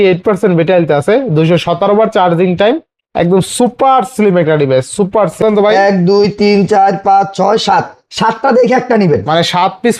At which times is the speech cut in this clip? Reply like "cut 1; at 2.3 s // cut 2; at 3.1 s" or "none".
cut 1; at 5.4 s